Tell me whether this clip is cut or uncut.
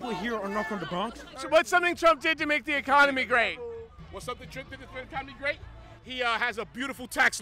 cut